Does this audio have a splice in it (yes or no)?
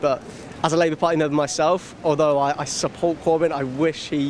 no